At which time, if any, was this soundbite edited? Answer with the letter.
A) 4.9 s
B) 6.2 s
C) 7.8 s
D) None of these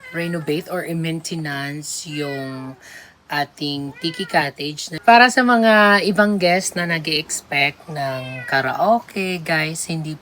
A